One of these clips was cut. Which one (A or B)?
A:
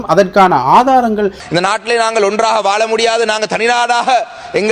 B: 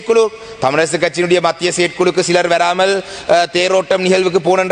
A